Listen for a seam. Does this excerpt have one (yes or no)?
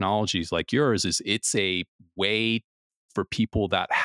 no